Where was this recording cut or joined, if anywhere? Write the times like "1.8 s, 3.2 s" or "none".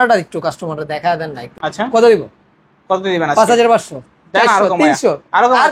1.5 s